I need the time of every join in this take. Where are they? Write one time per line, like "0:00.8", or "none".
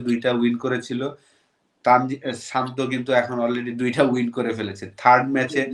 none